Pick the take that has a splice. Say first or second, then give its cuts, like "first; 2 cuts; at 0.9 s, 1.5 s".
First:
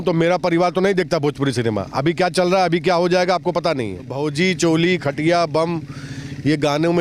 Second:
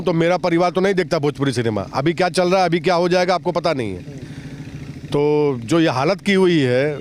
first; 1 cut; at 4.1 s